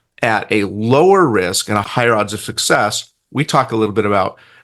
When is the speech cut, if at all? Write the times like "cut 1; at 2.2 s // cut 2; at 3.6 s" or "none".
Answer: cut 1; at 1.9 s

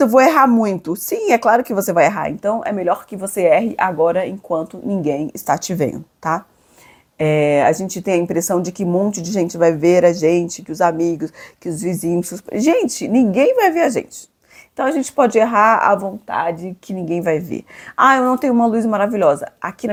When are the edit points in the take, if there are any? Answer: none

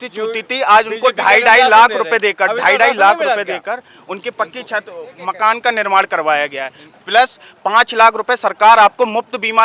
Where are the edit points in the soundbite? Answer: none

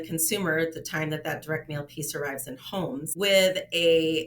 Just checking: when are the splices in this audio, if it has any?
cut 1; at 3.1 s

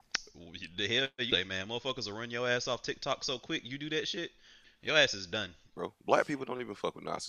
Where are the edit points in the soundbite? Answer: cut 1; at 4.7 s // cut 2; at 5.7 s

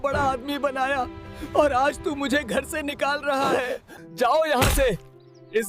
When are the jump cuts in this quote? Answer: cut 1; at 4.3 s

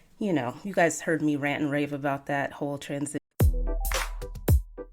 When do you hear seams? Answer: cut 1; at 3.3 s

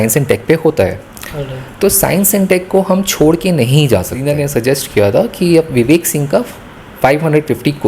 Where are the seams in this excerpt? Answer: cut 1; at 4.3 s

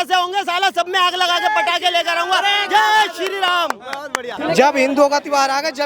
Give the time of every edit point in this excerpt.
cut 1; at 4.4 s

